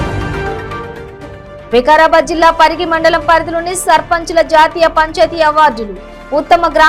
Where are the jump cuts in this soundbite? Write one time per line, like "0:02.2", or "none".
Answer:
none